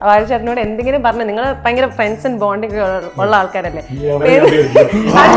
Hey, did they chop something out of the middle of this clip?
no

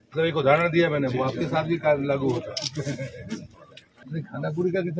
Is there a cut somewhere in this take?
yes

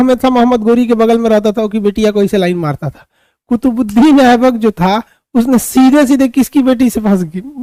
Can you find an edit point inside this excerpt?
no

